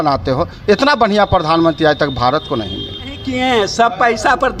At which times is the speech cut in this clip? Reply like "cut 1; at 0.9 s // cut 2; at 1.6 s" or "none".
cut 1; at 3.2 s